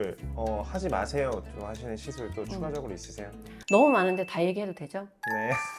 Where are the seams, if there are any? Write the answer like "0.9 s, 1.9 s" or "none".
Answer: none